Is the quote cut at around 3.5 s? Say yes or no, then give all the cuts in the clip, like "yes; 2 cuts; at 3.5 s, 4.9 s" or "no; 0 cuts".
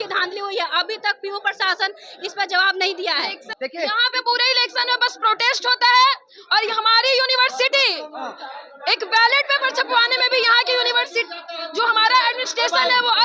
yes; 1 cut; at 3.5 s